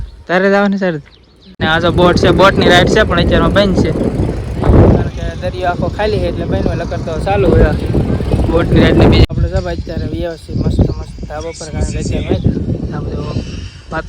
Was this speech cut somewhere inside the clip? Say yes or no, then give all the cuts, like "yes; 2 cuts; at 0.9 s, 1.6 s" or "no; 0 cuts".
yes; 2 cuts; at 1.6 s, 9.3 s